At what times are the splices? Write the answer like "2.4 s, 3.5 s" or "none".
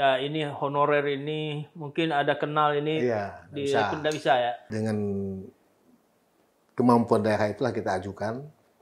4.7 s